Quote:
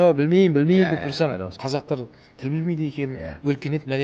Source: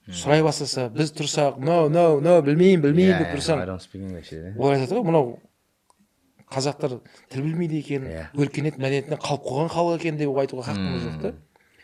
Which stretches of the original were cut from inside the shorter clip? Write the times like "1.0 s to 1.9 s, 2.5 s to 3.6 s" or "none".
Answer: 3.8 s to 6.4 s